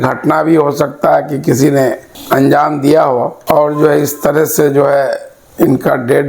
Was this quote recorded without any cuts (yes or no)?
yes